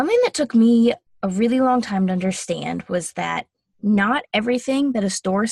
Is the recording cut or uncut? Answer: cut